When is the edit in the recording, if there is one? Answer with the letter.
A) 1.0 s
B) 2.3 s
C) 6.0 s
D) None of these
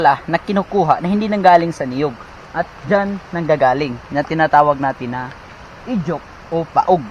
D